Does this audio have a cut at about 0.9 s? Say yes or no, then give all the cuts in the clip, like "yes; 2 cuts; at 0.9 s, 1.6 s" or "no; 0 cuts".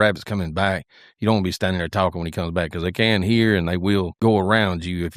no; 1 cut; at 4.1 s